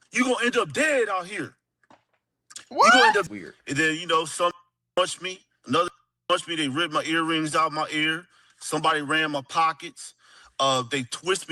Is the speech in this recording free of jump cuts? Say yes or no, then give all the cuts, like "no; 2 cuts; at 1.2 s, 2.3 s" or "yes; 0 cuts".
no; 1 cut; at 3.3 s